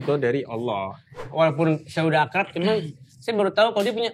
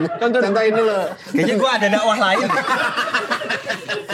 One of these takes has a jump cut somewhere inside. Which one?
first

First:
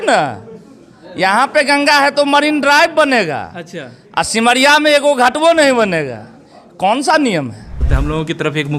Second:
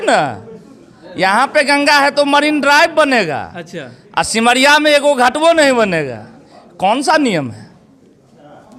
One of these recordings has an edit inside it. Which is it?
first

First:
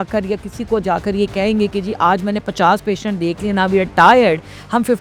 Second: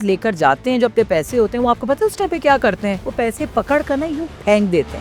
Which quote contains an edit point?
second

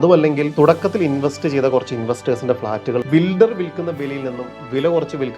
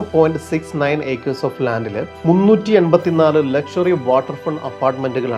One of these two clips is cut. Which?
first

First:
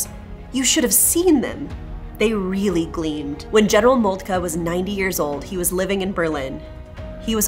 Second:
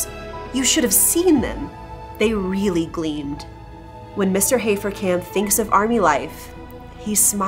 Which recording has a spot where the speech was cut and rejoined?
second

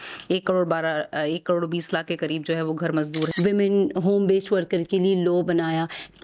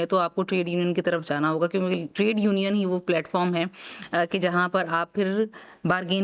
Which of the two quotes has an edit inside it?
first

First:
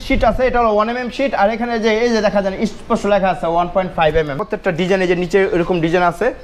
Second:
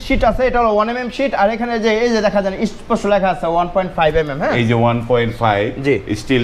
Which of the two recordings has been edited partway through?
first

